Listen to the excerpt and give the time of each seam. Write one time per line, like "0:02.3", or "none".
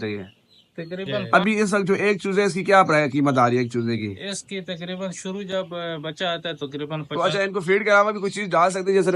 0:01.1
0:07.0

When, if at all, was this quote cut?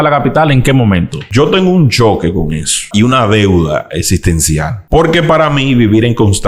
0:01.3
0:02.9
0:04.8

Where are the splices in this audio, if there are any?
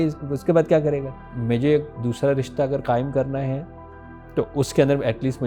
0:01.3

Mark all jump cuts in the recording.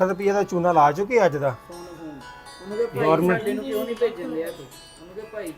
none

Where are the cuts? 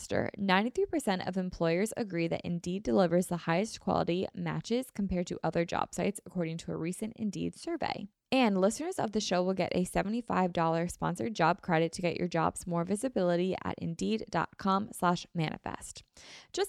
0:08.1

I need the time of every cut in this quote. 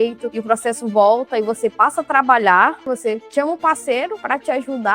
0:02.8

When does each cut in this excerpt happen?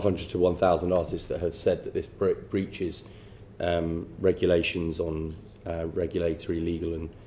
none

